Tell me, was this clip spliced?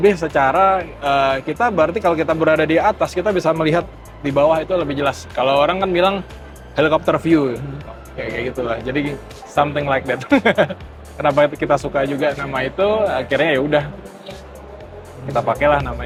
no; 0 cuts

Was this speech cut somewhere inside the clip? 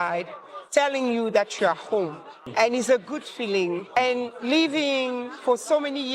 yes; 2 cuts; at 2.5 s, 4.0 s

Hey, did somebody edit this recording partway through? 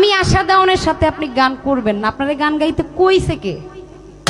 no; 0 cuts

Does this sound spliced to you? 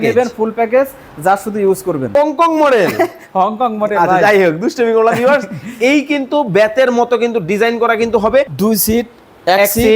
yes; 2 cuts; at 2.1 s, 8.5 s

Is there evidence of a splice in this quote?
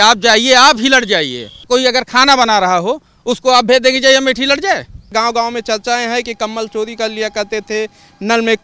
yes; 2 cuts; at 1.6 s, 5.1 s

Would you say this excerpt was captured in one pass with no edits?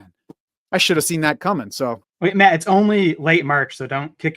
no; 1 cut; at 2.0 s

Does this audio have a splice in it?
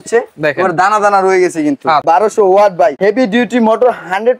yes; 2 cuts; at 2.0 s, 3.0 s

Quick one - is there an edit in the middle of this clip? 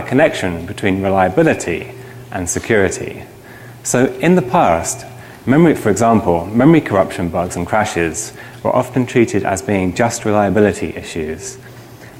yes; 1 cut; at 1.2 s

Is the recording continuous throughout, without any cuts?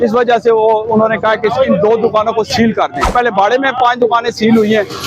no; 1 cut; at 3.1 s

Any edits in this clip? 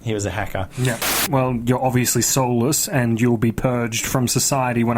yes; 1 cut; at 1.2 s

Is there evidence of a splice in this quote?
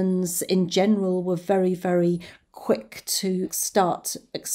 yes; 1 cut; at 3.6 s

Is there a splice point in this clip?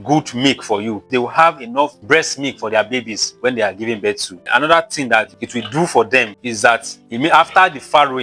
yes; 1 cut; at 1.1 s

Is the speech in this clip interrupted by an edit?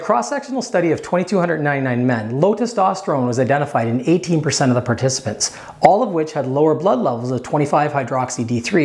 no; 0 cuts

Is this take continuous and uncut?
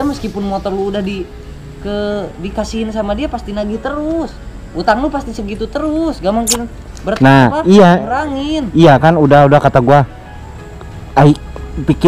yes; 0 cuts

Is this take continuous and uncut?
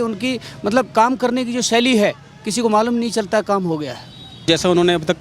no; 1 cut; at 4.2 s

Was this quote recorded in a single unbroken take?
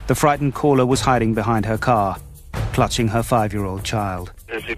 no; 1 cut; at 1.6 s

